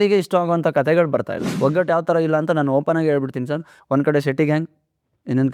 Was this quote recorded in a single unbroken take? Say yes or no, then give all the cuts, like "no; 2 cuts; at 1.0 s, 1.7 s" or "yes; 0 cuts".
no; 1 cut; at 1.4 s